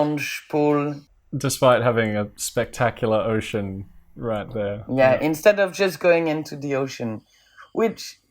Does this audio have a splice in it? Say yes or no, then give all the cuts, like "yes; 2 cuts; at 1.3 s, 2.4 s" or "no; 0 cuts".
yes; 1 cut; at 4.8 s